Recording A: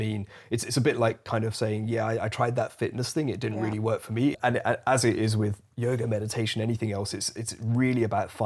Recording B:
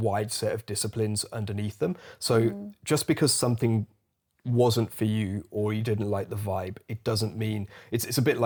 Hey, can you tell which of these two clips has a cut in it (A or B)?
A